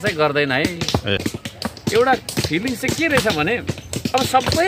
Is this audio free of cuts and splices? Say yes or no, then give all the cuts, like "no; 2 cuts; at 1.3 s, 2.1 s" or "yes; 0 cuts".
no; 1 cut; at 1.2 s